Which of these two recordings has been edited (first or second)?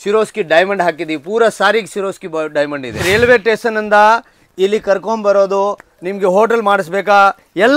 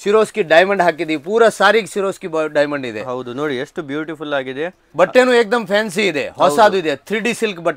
first